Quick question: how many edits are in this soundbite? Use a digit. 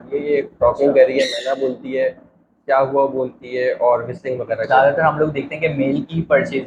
1